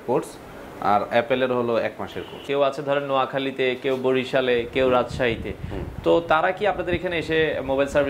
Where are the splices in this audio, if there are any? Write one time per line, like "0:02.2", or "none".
0:02.4

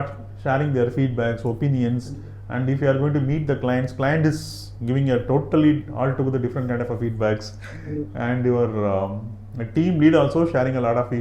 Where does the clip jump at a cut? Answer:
none

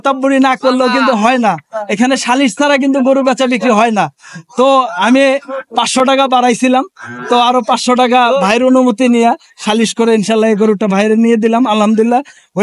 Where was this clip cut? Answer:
none

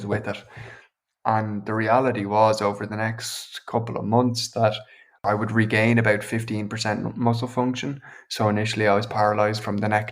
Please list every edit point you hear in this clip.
0:05.2

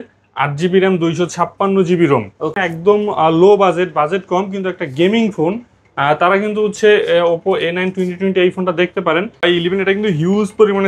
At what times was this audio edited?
0:02.7
0:09.4

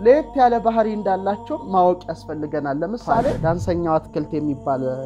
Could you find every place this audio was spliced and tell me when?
0:03.4

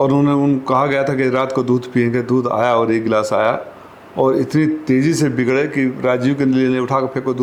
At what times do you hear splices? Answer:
none

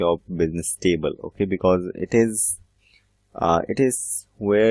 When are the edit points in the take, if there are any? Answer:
0:03.6

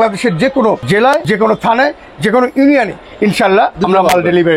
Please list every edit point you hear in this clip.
0:01.0
0:03.8

